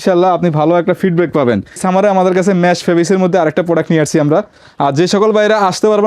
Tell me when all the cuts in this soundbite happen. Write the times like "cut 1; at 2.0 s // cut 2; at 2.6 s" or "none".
cut 1; at 1.8 s // cut 2; at 4.6 s